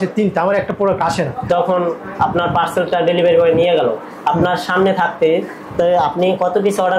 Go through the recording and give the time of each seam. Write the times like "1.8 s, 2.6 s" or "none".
1.4 s